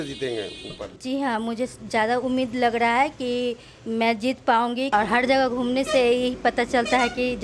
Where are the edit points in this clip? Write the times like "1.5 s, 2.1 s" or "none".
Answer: 0.9 s, 4.9 s